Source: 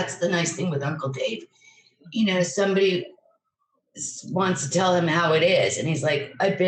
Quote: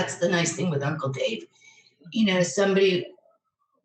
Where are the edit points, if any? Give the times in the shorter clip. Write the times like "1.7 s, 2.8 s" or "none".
none